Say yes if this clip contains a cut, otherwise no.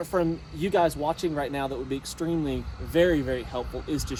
no